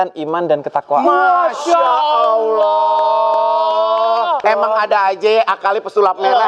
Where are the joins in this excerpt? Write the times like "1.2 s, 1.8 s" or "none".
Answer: 4.4 s